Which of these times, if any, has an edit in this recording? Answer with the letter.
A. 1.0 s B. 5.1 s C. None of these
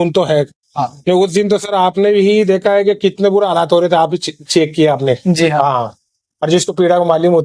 C